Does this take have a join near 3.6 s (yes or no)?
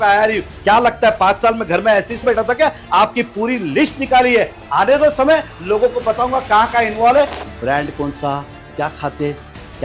no